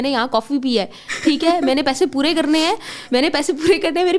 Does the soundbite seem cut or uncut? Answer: uncut